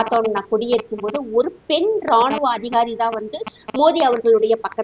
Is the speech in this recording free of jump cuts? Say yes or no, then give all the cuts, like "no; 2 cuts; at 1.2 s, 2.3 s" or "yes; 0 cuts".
yes; 0 cuts